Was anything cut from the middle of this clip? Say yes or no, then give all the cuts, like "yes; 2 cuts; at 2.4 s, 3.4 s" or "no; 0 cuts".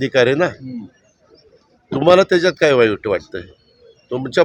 no; 0 cuts